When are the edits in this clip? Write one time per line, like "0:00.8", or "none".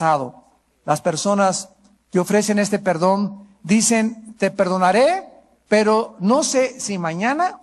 0:05.2